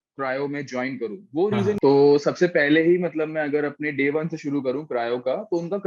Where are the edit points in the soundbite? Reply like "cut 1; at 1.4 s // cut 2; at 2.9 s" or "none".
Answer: cut 1; at 1.8 s